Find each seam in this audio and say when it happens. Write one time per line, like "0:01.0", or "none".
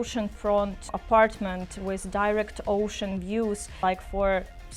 0:00.9
0:03.7